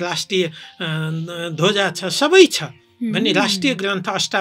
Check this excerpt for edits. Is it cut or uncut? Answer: uncut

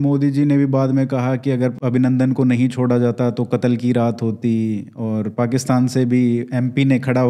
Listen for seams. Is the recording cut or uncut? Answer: cut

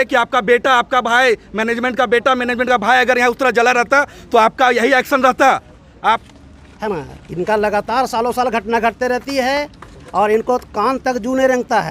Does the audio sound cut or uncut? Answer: cut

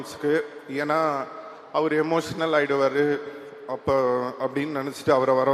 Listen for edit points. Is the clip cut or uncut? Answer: uncut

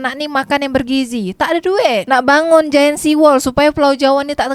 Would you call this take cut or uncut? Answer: uncut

